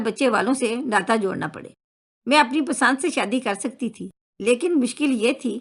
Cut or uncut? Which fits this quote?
uncut